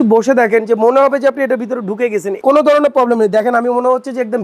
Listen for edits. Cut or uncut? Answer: cut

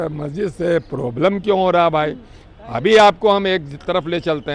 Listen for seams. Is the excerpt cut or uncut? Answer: uncut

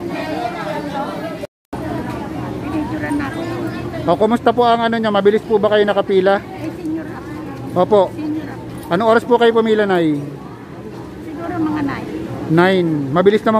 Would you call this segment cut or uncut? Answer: cut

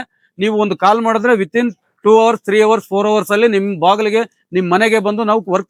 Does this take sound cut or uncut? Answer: uncut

